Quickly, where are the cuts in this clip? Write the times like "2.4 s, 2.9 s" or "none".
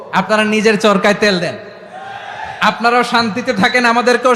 none

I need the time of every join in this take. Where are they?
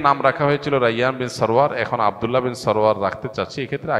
none

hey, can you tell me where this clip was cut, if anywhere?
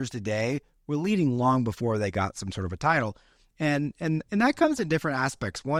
none

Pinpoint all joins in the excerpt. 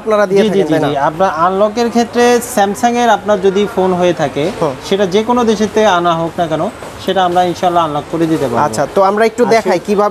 none

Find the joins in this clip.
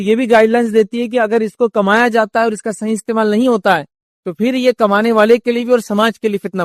none

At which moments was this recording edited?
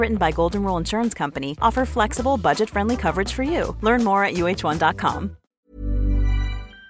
5.7 s

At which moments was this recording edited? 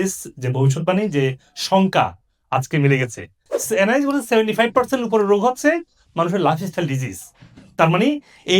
3.4 s

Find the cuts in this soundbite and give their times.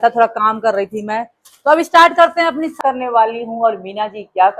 2.8 s

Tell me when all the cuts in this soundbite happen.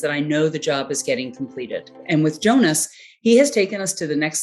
2.0 s

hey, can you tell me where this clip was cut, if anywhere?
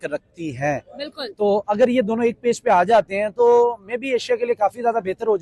none

